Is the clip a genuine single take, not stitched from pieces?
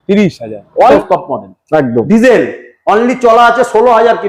no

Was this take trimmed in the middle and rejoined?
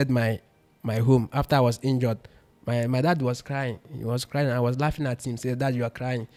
no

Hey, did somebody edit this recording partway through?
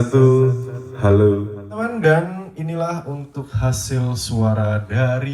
yes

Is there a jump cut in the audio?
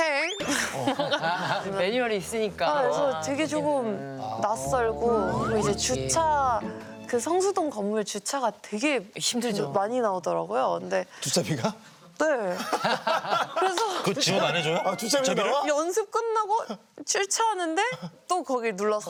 no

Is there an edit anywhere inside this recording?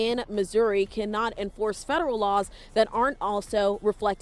no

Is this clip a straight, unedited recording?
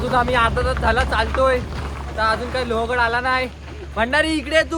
yes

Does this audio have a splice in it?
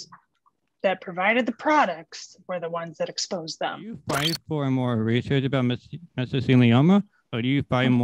yes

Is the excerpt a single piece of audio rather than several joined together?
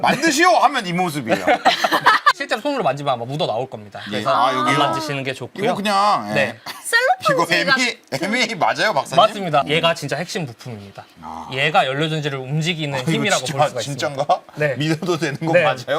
no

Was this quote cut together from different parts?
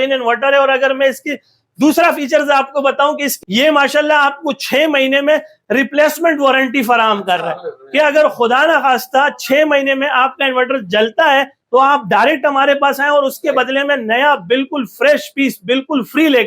yes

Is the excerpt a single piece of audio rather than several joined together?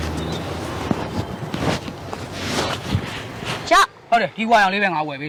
yes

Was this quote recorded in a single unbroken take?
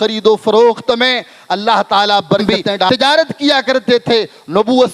no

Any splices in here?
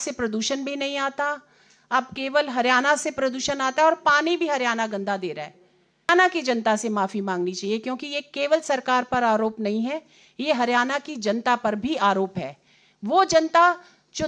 yes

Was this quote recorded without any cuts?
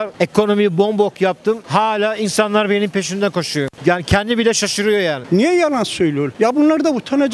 no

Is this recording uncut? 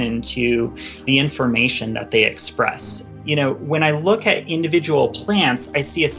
no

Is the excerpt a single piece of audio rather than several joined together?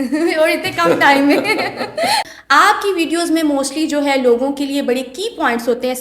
no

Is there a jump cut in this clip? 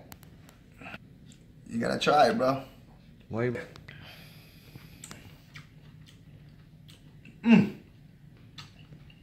yes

